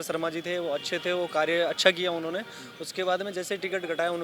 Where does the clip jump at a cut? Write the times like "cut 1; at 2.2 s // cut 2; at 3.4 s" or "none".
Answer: none